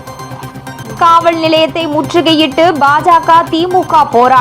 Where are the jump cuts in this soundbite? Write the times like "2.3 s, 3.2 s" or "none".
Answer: 1.0 s